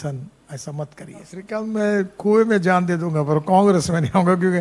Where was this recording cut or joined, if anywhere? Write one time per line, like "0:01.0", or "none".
0:01.4